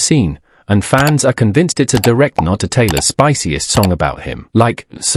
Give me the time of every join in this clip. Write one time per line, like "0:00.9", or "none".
none